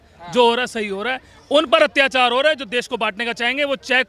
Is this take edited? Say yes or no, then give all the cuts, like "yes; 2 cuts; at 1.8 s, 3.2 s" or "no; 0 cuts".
no; 0 cuts